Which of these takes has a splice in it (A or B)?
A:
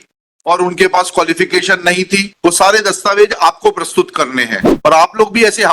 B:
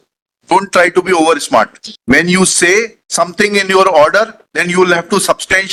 A